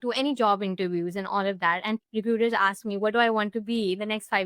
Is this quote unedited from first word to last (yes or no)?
no